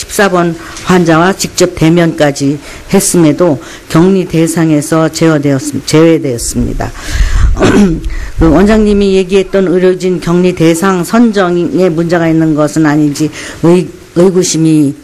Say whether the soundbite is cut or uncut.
uncut